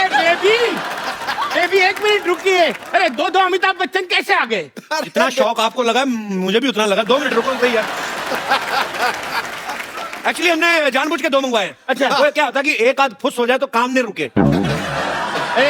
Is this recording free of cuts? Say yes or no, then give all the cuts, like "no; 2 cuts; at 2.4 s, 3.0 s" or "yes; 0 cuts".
yes; 0 cuts